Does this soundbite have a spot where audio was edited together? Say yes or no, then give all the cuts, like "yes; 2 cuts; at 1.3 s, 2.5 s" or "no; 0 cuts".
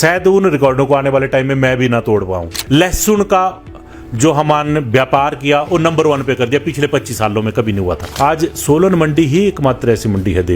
yes; 2 cuts; at 2.6 s, 8.1 s